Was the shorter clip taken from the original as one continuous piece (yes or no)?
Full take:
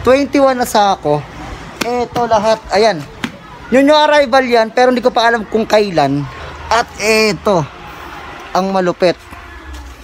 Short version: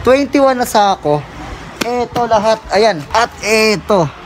no